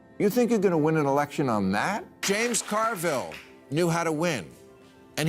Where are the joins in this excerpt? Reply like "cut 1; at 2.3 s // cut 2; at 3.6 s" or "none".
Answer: cut 1; at 2.2 s

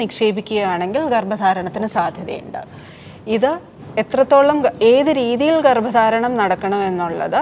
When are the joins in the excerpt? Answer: none

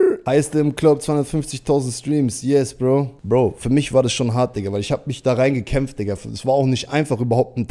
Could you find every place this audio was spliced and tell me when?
cut 1; at 3.2 s

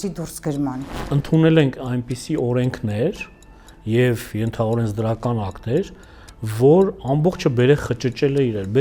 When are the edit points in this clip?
cut 1; at 0.9 s

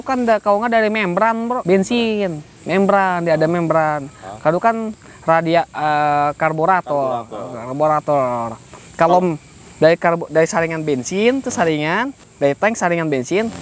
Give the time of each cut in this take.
cut 1; at 1.6 s

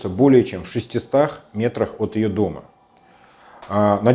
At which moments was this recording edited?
none

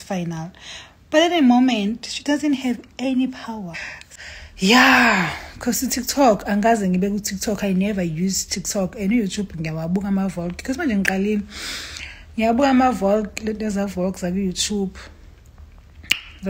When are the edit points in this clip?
cut 1; at 4.0 s

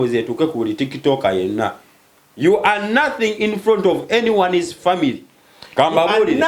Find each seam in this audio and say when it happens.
none

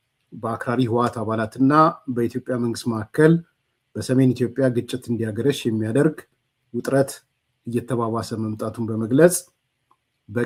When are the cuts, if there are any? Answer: none

